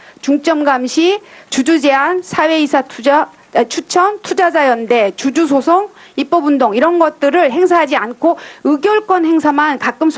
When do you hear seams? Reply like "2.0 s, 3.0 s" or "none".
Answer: 8.9 s